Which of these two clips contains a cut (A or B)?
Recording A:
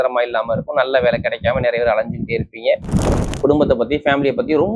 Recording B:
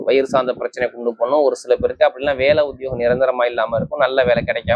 A